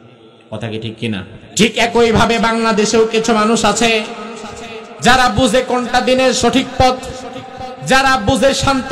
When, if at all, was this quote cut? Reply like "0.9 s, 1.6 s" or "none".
1.4 s